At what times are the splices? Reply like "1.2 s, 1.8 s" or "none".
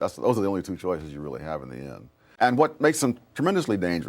2.1 s